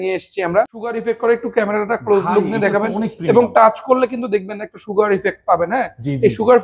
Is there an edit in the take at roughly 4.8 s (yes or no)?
no